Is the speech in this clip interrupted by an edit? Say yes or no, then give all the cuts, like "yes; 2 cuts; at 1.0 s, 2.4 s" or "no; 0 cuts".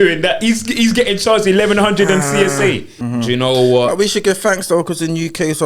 yes; 1 cut; at 3.0 s